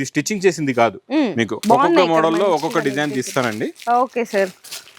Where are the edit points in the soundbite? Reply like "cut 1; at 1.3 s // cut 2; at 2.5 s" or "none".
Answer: cut 1; at 1.6 s